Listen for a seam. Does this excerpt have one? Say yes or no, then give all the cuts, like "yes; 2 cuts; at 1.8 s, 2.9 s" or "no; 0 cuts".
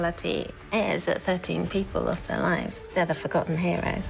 yes; 1 cut; at 2.7 s